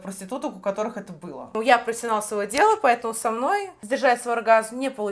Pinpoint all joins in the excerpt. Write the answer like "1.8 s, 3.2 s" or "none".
1.5 s, 3.8 s